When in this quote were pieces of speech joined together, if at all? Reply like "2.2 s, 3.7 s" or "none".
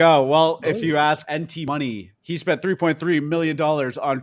1.2 s, 2.1 s